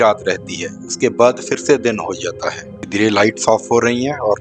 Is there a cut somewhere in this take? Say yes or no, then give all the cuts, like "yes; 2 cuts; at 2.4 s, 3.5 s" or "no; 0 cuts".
yes; 1 cut; at 2.9 s